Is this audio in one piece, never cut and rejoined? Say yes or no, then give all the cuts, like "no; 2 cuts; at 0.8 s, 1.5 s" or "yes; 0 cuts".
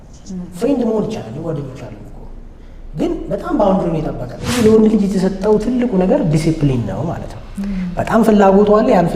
no; 1 cut; at 4.5 s